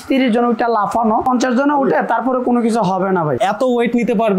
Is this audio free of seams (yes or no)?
no